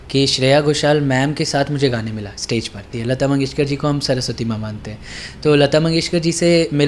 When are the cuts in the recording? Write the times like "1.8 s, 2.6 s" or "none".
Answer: 2.9 s